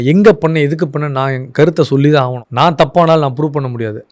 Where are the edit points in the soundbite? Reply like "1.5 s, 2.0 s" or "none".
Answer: 2.4 s

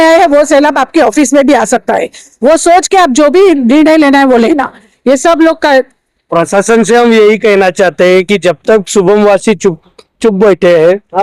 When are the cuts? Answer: none

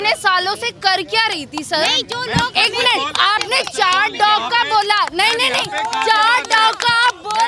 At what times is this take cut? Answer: none

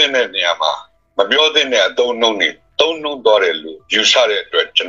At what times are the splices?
0.9 s

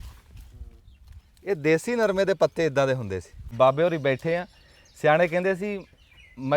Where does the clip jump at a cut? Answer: 3.4 s

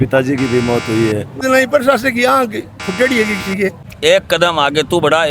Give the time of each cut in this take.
1.4 s, 3.9 s

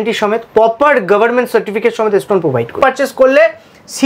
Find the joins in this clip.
2.8 s

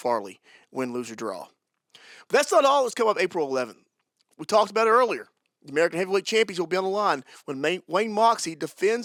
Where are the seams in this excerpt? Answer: none

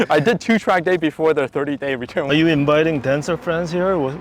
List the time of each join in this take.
2.3 s

